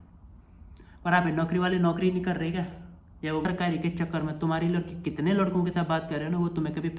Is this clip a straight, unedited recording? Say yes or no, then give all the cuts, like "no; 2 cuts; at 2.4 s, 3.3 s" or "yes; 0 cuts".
no; 1 cut; at 3.5 s